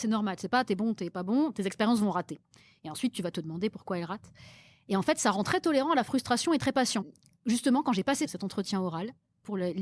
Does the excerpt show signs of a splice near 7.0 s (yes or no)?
yes